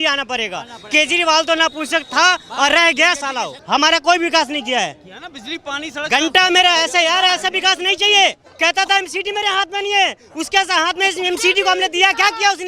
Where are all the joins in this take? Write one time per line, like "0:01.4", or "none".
0:03.5
0:08.5